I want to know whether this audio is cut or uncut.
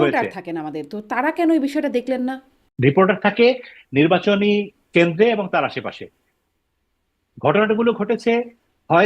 cut